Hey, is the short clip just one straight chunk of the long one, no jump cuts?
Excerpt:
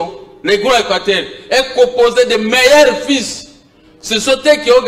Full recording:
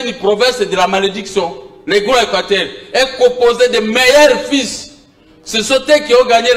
yes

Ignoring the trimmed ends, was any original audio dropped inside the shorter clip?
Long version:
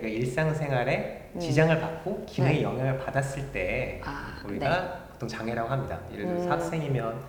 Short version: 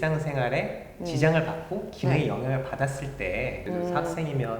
yes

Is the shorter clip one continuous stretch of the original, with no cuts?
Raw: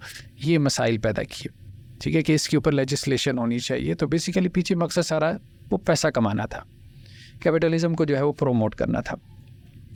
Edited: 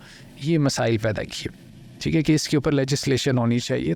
yes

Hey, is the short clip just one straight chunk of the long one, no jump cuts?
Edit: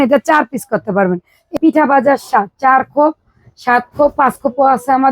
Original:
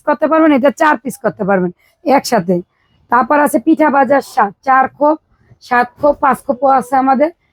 no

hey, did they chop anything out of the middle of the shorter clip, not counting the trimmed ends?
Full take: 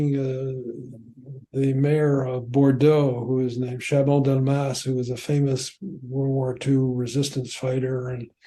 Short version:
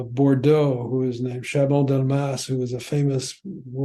no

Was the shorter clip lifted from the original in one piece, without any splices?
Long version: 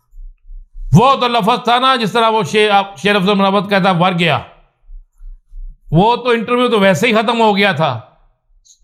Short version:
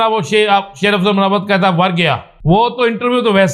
no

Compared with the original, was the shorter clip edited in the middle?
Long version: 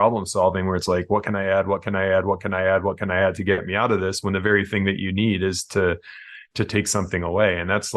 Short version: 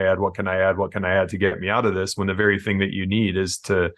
no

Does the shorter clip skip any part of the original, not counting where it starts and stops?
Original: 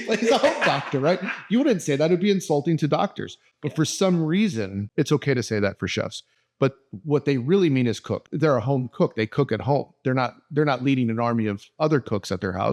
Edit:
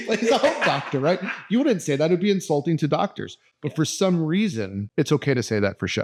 no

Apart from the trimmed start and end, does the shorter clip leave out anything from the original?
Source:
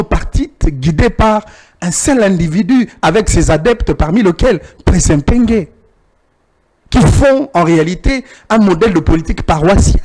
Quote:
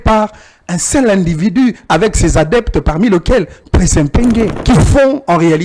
yes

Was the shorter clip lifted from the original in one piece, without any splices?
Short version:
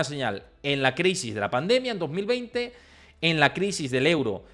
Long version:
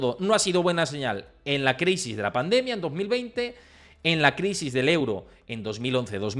yes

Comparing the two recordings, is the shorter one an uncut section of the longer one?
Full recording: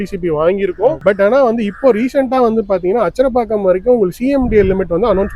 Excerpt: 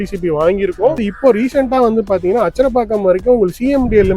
no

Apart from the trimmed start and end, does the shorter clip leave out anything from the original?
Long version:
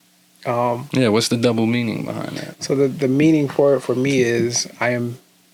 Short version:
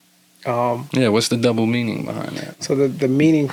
no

